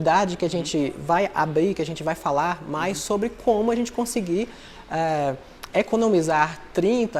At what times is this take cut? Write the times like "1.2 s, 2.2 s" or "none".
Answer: none